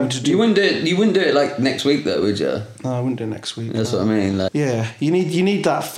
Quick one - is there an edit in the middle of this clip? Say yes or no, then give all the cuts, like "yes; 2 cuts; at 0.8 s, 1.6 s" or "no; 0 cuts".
yes; 1 cut; at 4.5 s